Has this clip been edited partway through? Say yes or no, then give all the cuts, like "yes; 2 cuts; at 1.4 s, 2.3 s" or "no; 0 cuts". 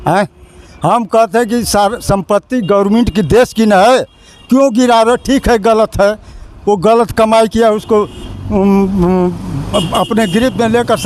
no; 0 cuts